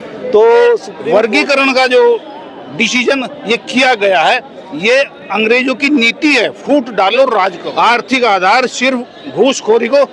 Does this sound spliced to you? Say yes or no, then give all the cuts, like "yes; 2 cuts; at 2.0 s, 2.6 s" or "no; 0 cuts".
yes; 2 cuts; at 0.9 s, 7.6 s